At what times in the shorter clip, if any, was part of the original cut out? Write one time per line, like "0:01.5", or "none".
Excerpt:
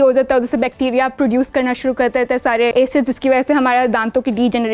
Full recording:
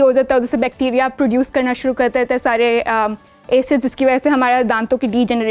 0:02.7